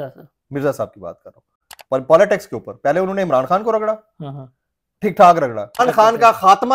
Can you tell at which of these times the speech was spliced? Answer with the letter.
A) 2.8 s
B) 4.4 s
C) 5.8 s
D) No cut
C